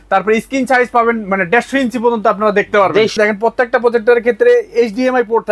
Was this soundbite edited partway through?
yes; 1 cut; at 3.1 s

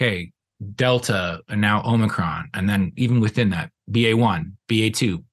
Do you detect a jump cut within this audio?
no; 0 cuts

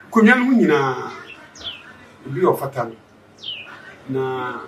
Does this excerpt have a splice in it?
no; 0 cuts

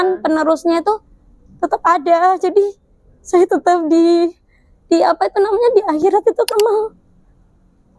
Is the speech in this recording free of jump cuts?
no; 1 cut; at 6.5 s

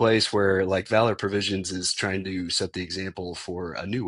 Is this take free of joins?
yes; 0 cuts

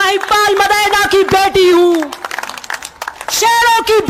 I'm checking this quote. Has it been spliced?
no; 0 cuts

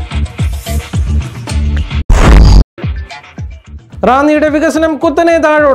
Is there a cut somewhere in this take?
no; 0 cuts

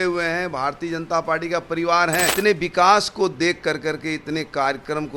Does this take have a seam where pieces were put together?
yes; 1 cut; at 2.3 s

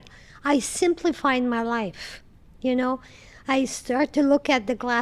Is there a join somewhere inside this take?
no; 0 cuts

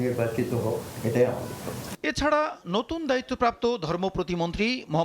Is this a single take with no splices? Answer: yes; 0 cuts

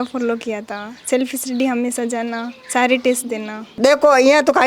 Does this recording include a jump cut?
yes; 1 cut; at 3.7 s

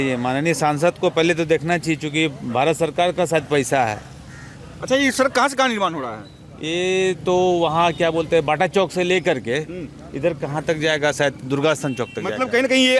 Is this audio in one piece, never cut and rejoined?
yes; 0 cuts

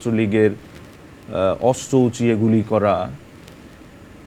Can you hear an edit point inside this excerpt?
no; 0 cuts

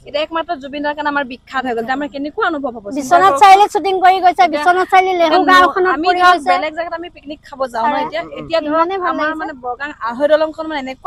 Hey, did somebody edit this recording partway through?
no; 0 cuts

